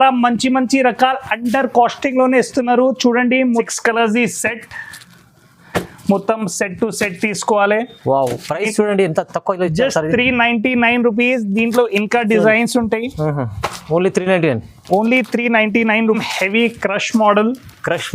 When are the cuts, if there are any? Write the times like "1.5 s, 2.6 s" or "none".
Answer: 3.7 s, 16.2 s